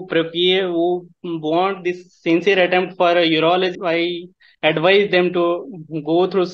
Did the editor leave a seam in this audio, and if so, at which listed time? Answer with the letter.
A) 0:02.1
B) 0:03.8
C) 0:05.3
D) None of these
B